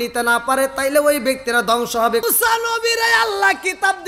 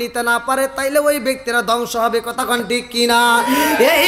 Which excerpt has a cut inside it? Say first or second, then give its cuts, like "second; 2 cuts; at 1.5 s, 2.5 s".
first; 1 cut; at 2.2 s